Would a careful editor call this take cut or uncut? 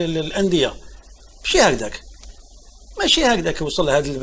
uncut